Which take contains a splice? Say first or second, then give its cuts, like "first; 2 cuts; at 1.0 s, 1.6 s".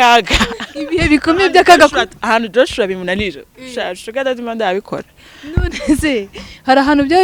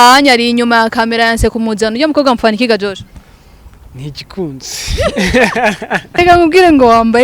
second; 1 cut; at 6.2 s